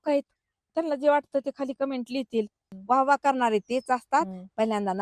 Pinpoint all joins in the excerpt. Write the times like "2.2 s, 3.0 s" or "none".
2.6 s